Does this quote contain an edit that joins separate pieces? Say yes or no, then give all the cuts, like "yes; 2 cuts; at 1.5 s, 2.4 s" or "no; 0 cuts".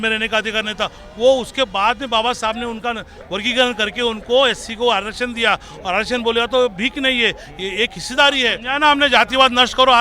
yes; 1 cut; at 8.6 s